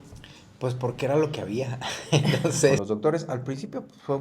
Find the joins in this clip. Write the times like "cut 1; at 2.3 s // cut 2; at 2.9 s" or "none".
cut 1; at 2.8 s